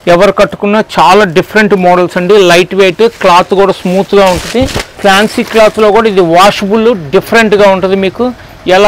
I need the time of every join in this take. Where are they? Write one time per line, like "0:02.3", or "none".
0:04.8